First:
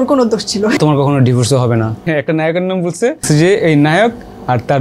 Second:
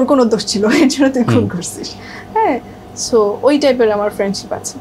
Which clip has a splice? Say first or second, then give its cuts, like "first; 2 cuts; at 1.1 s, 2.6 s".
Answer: first; 3 cuts; at 0.8 s, 2.0 s, 3.2 s